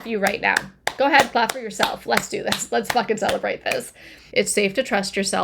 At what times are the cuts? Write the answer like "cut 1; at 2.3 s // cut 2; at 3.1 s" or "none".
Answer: cut 1; at 4.2 s